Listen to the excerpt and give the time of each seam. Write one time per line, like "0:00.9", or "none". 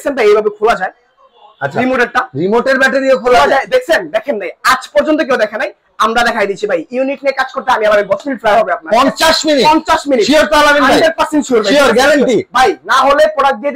0:08.3